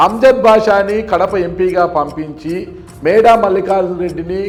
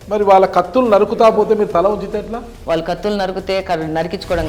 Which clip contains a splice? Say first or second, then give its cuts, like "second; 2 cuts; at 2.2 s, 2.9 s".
second; 1 cut; at 2.5 s